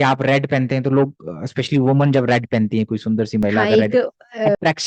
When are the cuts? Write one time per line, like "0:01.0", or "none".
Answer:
none